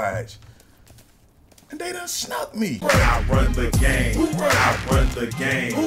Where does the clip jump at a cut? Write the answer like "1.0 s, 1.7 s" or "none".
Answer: 2.8 s